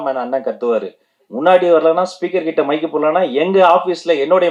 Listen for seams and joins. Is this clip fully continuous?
yes; 0 cuts

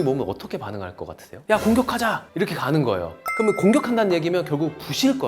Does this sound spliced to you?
yes; 2 cuts; at 1.4 s, 3.2 s

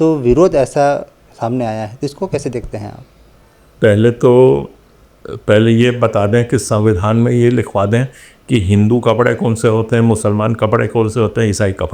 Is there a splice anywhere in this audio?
no; 0 cuts

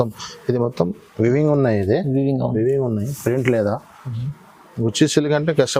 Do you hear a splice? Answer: no; 0 cuts

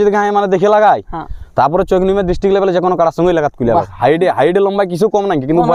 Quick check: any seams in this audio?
no; 0 cuts

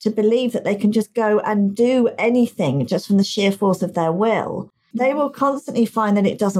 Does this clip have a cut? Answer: yes; 1 cut; at 4.8 s

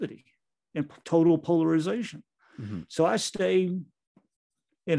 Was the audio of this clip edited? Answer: no; 0 cuts

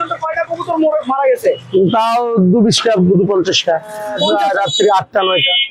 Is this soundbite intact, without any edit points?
no; 1 cut; at 4.1 s

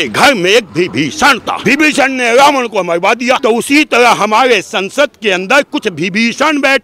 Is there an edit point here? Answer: yes; 2 cuts; at 1.5 s, 3.4 s

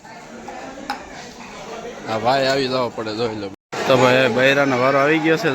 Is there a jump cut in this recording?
yes; 1 cut; at 3.6 s

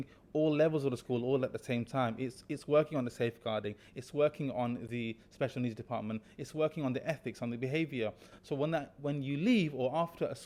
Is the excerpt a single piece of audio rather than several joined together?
yes; 0 cuts

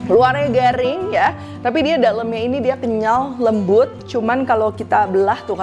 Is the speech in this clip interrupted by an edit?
no; 0 cuts

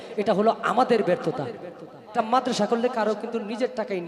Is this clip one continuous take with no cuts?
no; 1 cut; at 2.0 s

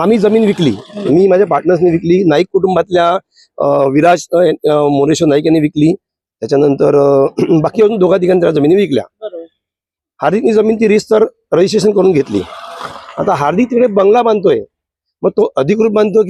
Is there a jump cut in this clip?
no; 0 cuts

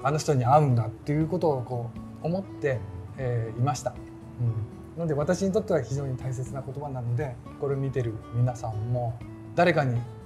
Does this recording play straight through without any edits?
yes; 0 cuts

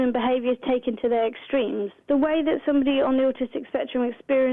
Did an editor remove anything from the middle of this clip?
yes; 1 cut; at 1.9 s

